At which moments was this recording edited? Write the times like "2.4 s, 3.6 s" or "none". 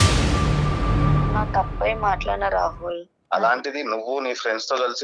none